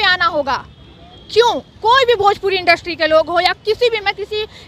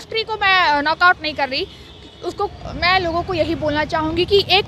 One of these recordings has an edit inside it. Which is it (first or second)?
second